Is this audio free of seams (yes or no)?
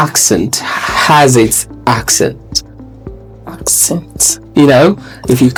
yes